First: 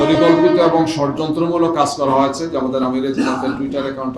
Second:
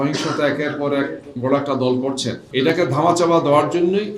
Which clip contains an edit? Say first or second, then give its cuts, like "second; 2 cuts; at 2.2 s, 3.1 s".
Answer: second; 1 cut; at 2.7 s